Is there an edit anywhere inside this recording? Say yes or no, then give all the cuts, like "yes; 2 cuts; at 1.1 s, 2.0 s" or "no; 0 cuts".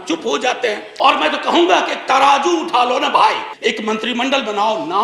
yes; 2 cuts; at 0.8 s, 3.5 s